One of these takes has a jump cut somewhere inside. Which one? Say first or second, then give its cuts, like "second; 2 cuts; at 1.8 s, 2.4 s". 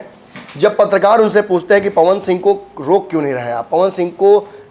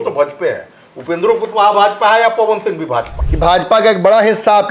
second; 1 cut; at 3.2 s